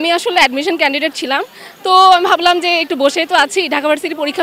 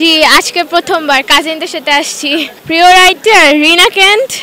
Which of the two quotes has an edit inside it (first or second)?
second